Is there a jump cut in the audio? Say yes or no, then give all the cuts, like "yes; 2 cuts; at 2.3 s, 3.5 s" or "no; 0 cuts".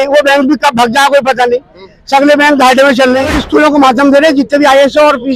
yes; 1 cut; at 3.4 s